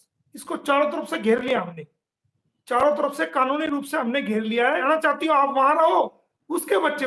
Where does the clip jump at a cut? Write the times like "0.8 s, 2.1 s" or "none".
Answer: 4.8 s